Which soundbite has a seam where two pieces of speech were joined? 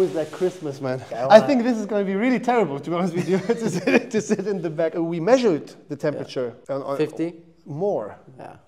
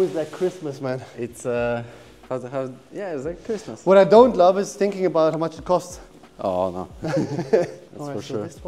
first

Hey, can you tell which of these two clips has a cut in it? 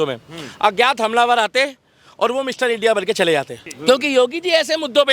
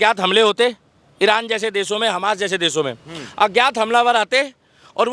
first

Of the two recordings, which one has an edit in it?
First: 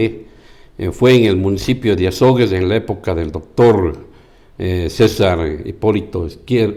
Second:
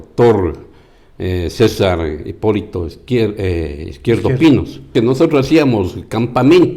second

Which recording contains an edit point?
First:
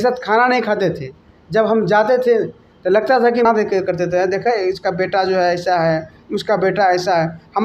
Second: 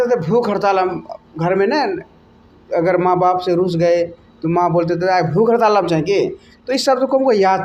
first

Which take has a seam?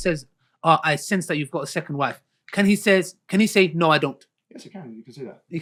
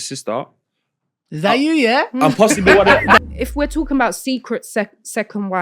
second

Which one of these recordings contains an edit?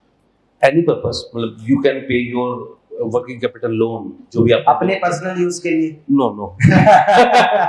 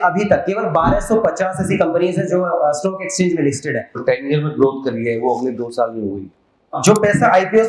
second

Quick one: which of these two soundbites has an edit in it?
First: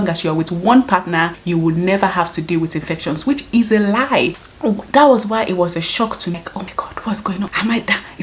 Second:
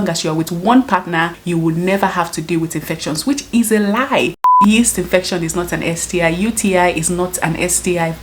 second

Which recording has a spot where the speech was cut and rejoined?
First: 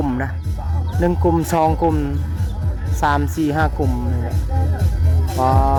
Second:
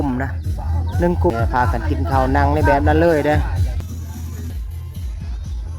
second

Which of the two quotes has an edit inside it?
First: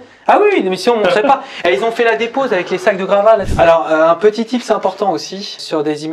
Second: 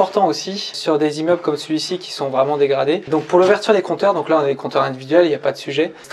first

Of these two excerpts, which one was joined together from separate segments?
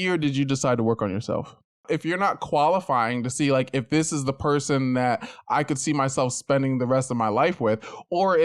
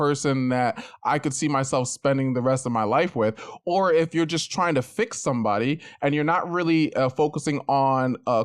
first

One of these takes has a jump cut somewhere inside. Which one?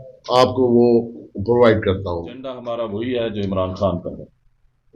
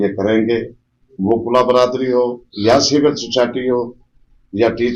first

